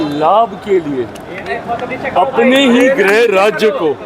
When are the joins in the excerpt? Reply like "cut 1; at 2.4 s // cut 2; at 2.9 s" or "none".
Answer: none